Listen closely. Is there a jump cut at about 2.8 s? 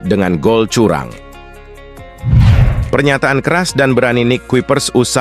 yes; 2 cuts; at 1.7 s, 2.8 s

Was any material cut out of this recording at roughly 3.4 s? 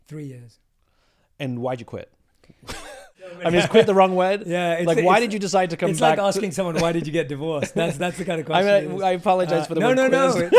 yes; 1 cut; at 3.4 s

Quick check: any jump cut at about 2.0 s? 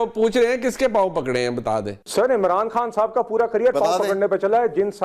yes; 1 cut; at 2.0 s

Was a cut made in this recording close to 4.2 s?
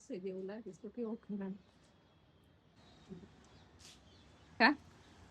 no; 1 cut; at 2.8 s

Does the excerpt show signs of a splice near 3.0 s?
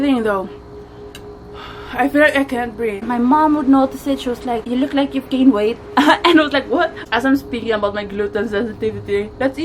yes; 3 cuts; at 3.0 s, 4.6 s, 7.0 s

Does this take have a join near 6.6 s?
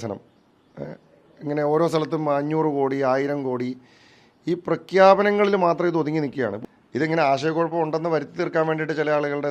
yes; 1 cut; at 6.6 s

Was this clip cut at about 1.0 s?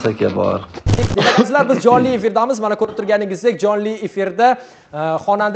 yes; 1 cut; at 1.0 s

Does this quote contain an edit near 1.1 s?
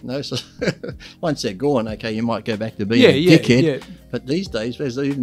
yes; 1 cut; at 1.1 s

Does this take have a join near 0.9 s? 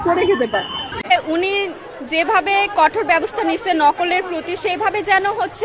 yes; 1 cut; at 0.9 s

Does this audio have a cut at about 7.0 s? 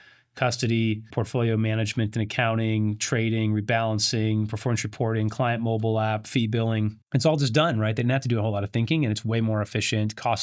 yes; 2 cuts; at 1.1 s, 7.0 s

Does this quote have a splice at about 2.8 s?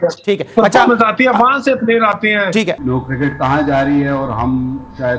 yes; 1 cut; at 2.8 s

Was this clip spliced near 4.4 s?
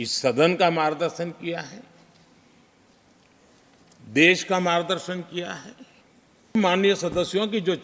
no; 1 cut; at 6.5 s

